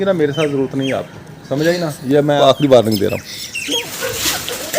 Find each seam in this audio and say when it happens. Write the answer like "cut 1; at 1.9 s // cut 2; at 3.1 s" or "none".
cut 1; at 2.4 s // cut 2; at 3.8 s